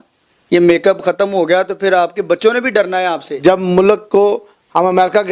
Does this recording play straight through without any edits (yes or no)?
no